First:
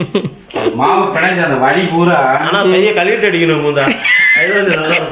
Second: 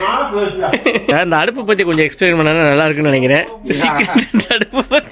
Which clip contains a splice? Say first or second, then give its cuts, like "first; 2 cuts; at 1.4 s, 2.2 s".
second; 1 cut; at 1.1 s